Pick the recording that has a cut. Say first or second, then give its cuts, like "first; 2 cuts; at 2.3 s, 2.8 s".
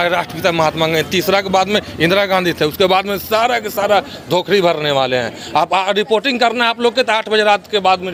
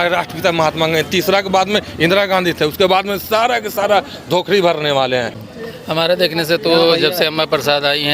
second; 1 cut; at 5.4 s